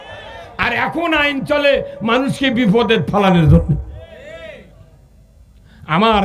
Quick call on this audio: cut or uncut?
uncut